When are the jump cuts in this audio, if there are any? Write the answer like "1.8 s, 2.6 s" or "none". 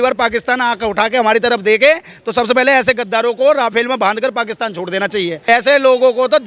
none